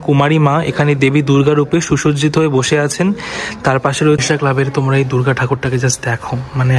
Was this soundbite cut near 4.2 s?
yes; 1 cut; at 4.2 s

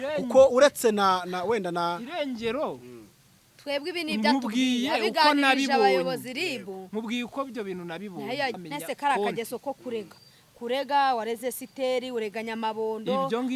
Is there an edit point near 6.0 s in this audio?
no; 1 cut; at 8.6 s

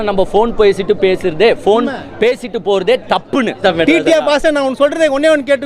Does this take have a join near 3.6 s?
yes; 1 cut; at 3.6 s

